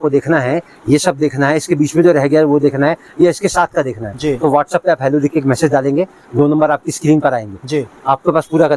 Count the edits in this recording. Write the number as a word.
zero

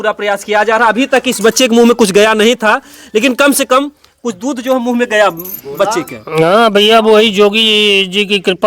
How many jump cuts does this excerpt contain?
zero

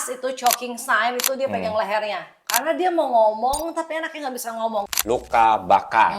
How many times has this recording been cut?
one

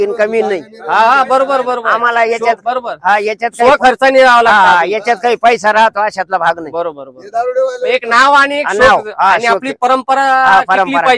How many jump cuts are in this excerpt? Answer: zero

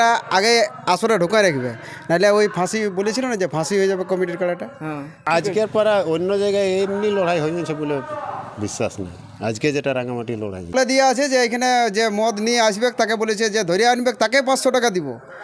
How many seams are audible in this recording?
two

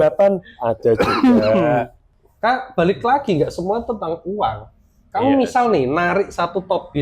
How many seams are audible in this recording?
one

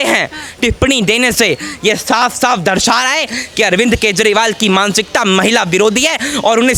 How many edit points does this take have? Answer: zero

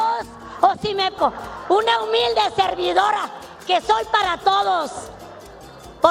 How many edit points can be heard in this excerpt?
one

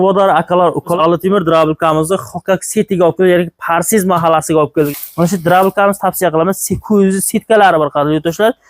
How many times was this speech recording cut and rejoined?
two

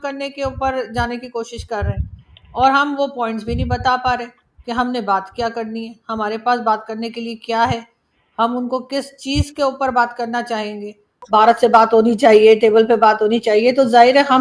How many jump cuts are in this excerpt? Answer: one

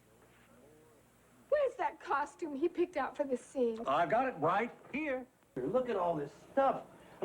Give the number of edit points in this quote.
one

